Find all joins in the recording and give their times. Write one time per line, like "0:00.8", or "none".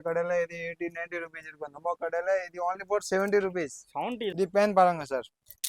0:04.3